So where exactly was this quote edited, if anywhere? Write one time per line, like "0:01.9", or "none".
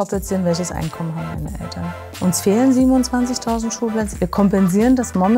0:02.2
0:04.1